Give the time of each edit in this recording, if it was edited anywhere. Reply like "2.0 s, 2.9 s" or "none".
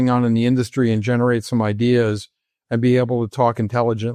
none